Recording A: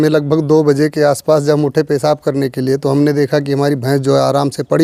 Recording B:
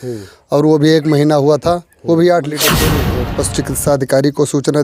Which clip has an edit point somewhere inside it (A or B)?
B